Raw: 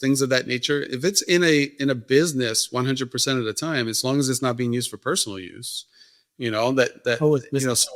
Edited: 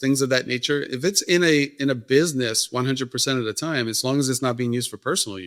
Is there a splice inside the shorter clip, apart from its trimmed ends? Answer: no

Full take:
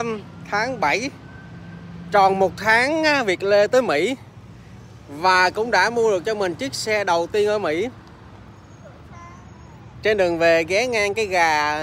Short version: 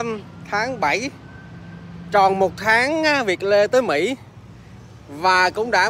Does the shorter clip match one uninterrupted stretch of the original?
yes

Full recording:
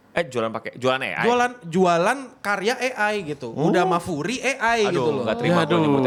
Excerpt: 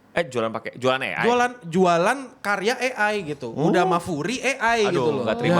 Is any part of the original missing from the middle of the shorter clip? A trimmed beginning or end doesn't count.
no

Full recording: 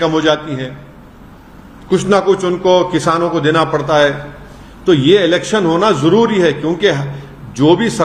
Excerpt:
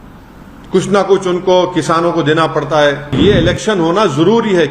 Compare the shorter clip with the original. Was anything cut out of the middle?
yes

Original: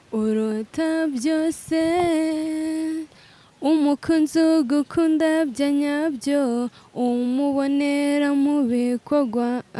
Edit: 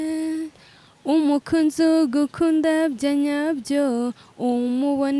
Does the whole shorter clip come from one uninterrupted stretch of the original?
yes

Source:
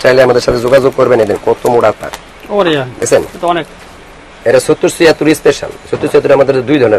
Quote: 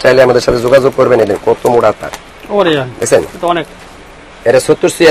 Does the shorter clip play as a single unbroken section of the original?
yes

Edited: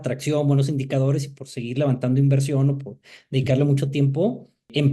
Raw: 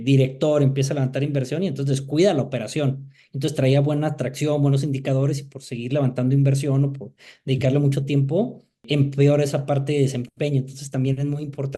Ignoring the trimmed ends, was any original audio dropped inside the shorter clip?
no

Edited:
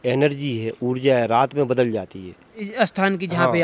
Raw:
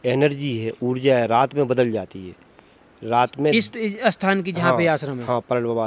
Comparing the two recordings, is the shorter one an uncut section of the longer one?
no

